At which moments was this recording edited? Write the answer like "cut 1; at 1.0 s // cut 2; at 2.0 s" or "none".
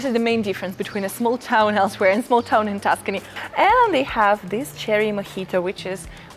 cut 1; at 3.3 s